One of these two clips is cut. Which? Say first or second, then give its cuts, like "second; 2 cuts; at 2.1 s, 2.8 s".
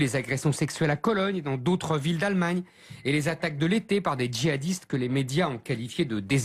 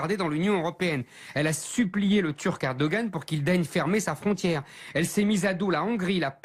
first; 1 cut; at 4.0 s